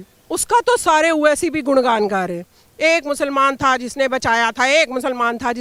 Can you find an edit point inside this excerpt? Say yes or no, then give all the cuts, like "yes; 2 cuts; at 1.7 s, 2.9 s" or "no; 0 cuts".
no; 0 cuts